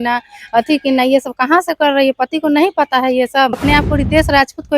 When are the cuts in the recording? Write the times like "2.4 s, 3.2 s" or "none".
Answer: 3.6 s